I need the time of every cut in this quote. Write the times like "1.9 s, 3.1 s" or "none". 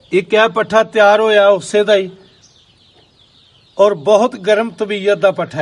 none